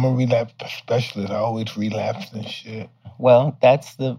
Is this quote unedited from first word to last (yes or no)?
no